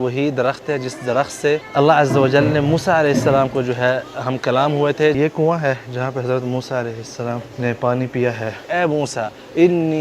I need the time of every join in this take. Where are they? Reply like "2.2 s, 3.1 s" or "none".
1.7 s, 5.1 s, 7.5 s, 8.6 s